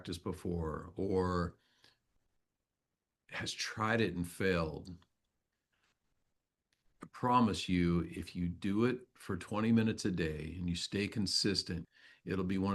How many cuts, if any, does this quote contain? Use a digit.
1